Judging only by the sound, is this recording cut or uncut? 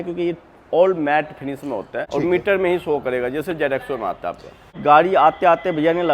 cut